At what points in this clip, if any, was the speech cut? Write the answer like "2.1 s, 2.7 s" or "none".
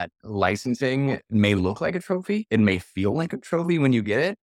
2.4 s